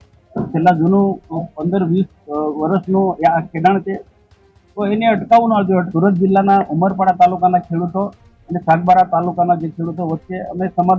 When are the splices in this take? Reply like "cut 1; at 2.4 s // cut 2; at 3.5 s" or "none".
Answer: cut 1; at 5.9 s